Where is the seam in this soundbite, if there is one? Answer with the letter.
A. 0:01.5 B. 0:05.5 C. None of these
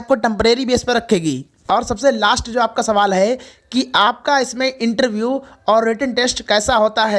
A